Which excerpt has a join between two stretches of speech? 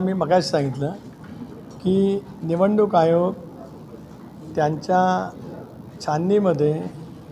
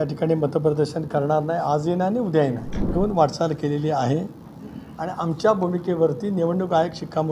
second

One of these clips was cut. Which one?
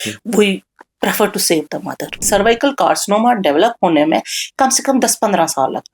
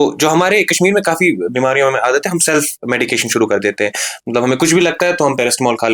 first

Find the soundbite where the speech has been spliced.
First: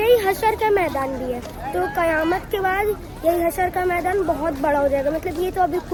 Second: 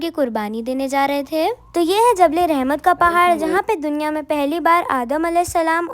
second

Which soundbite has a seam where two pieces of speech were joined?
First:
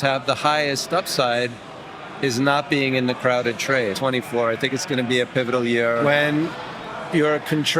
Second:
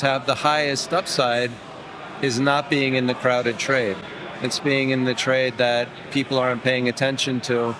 first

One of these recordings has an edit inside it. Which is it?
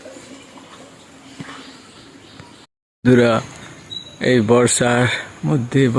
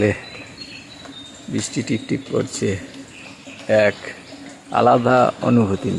first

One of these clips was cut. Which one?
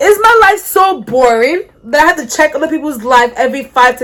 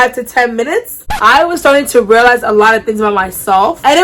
second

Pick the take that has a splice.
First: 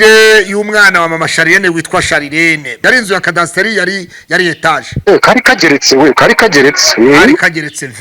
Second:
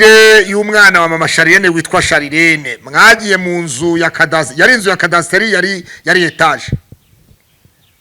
first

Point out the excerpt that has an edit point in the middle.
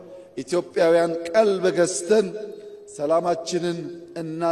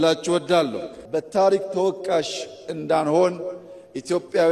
second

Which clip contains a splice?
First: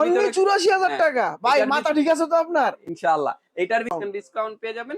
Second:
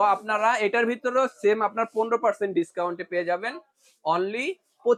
first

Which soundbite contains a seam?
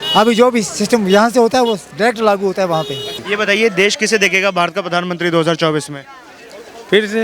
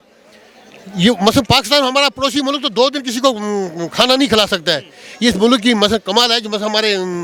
first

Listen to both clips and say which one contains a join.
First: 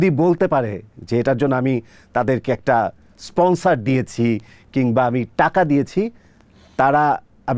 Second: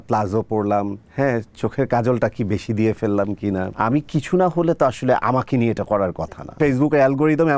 second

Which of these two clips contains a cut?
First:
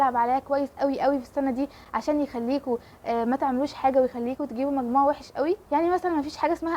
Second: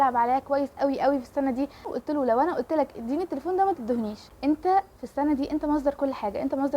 second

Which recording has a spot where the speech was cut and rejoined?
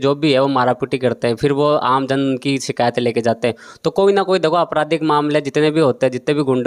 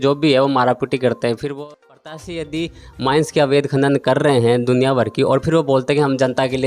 second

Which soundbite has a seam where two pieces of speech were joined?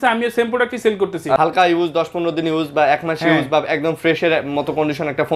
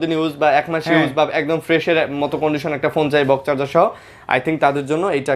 first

